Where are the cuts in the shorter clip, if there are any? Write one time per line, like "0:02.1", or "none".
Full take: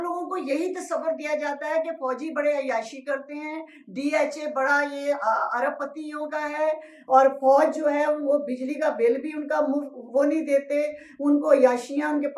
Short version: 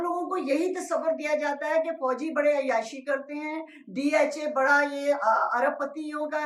none